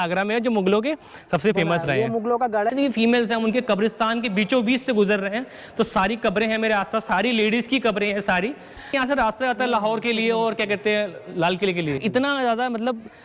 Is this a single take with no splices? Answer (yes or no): no